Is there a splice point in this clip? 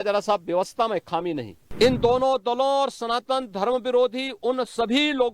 yes; 1 cut; at 1.6 s

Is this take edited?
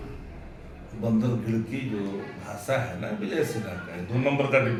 no; 0 cuts

